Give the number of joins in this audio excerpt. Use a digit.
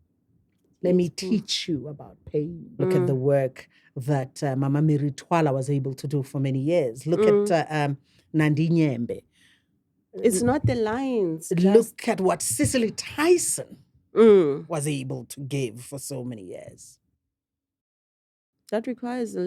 1